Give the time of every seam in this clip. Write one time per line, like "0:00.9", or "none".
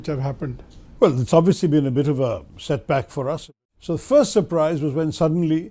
0:03.4